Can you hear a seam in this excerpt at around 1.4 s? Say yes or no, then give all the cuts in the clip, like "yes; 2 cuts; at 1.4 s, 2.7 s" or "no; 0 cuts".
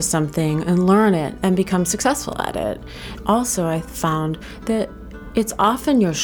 yes; 2 cuts; at 1.4 s, 3.1 s